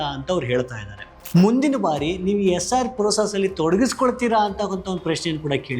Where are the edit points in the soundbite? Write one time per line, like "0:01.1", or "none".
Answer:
0:01.2